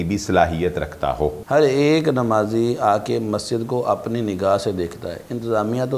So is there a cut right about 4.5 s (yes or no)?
no